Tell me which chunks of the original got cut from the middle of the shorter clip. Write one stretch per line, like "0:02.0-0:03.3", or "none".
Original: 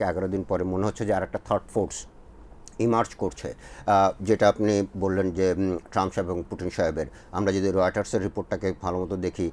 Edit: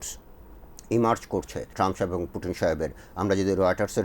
0:03.6-0:05.8